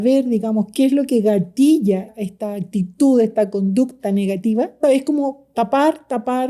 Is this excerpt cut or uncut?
cut